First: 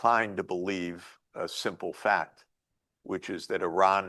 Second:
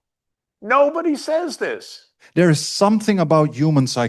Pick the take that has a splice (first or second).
second